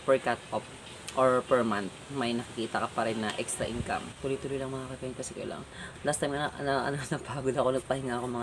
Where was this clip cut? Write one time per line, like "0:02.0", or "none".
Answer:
0:04.1